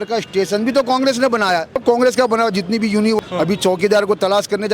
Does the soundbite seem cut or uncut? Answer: cut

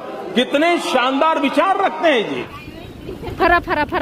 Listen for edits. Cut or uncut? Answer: cut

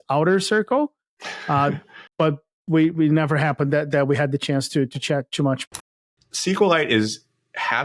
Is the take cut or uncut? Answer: cut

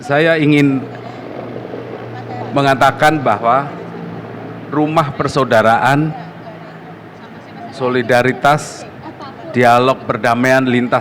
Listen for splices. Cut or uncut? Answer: uncut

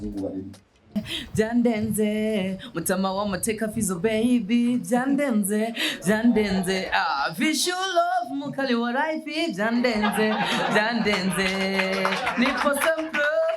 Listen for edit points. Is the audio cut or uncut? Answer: cut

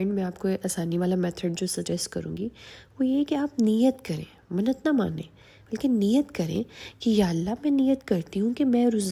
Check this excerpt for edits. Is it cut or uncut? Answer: uncut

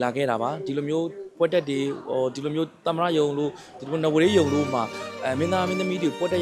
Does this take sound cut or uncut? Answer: uncut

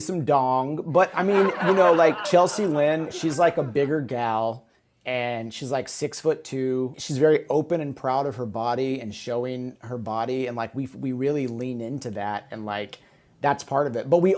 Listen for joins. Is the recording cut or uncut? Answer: cut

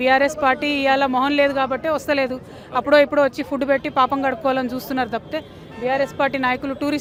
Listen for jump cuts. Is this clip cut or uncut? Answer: uncut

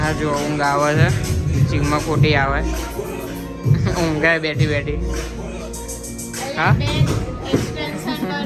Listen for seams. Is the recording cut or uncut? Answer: uncut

